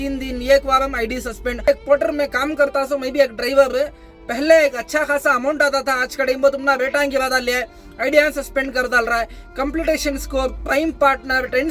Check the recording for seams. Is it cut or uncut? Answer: cut